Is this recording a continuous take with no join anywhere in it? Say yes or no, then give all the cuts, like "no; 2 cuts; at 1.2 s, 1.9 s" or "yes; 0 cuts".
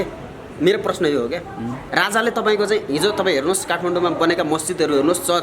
no; 1 cut; at 1.8 s